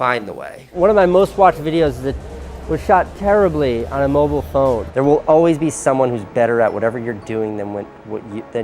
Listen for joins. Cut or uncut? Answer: cut